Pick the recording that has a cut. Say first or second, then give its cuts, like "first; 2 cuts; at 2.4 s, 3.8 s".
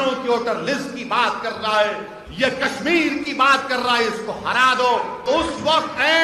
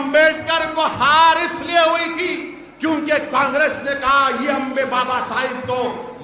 first; 1 cut; at 5.3 s